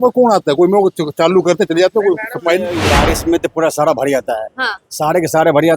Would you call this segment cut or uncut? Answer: cut